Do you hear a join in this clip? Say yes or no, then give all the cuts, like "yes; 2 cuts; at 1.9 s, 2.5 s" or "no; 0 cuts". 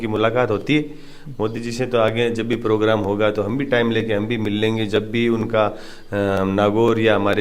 no; 0 cuts